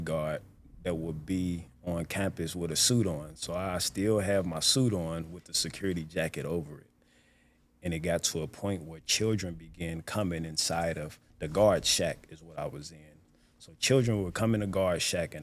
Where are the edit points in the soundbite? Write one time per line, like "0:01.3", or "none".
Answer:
none